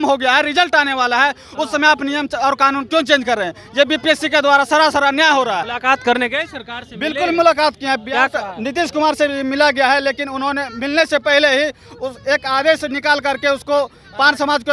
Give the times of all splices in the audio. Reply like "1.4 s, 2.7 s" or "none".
5.7 s